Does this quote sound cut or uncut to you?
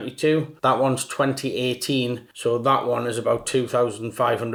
uncut